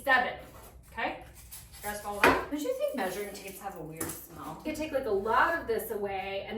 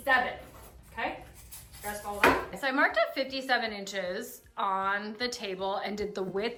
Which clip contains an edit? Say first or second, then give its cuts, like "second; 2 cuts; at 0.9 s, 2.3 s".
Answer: first; 2 cuts; at 2.5 s, 4.6 s